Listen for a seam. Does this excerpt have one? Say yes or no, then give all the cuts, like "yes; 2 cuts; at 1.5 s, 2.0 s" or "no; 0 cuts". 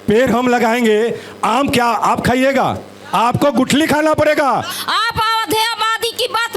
yes; 1 cut; at 4.7 s